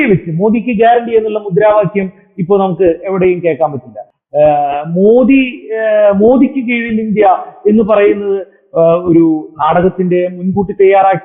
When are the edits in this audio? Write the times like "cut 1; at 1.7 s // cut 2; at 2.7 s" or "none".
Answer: none